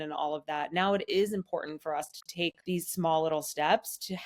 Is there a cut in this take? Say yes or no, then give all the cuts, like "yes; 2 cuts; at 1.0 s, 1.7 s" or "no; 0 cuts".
yes; 1 cut; at 2.6 s